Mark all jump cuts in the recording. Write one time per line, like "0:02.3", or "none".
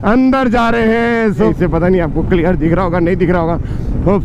0:01.5